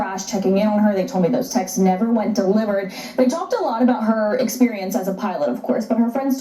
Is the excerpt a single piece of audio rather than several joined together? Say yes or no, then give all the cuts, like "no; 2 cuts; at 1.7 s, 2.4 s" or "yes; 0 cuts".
no; 1 cut; at 5.1 s